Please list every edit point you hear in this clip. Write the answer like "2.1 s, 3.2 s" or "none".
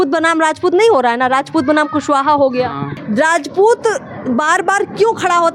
3.0 s